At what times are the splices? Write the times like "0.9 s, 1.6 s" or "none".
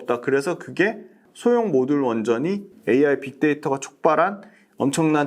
1.2 s, 2.7 s

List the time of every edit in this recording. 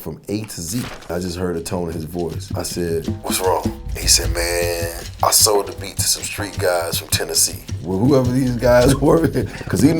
1.1 s

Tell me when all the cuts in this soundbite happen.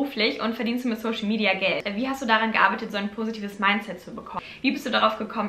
1.9 s, 4.5 s

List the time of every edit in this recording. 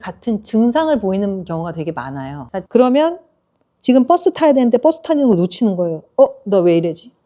2.7 s

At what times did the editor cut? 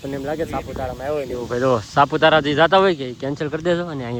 none

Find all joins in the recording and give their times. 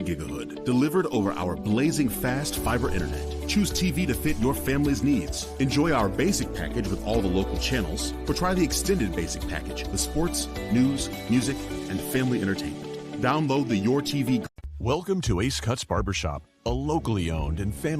14.4 s

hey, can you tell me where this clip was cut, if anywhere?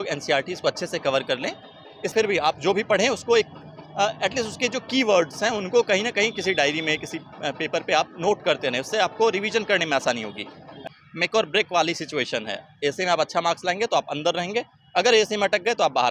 2.1 s, 10.8 s

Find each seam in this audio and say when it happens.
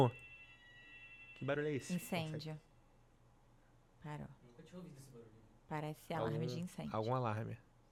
none

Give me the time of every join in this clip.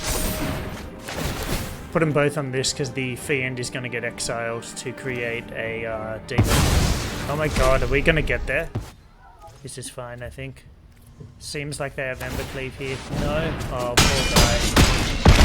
8.7 s

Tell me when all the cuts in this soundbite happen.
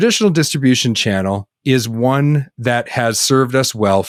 none

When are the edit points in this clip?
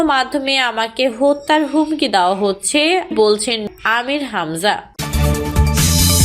4.9 s

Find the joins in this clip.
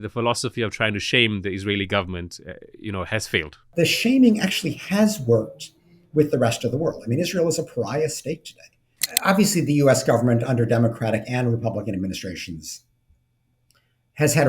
3.7 s, 9.1 s

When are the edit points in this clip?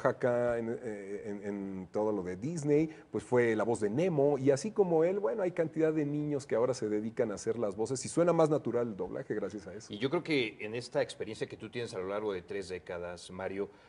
7.9 s

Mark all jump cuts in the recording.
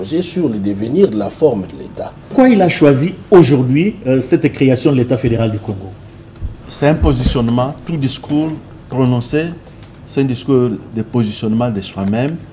2.3 s

